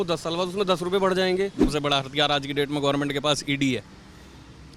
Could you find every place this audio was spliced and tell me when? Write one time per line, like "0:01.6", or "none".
0:01.7